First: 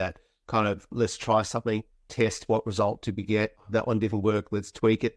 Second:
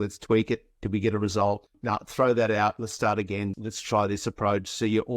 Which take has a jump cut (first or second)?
second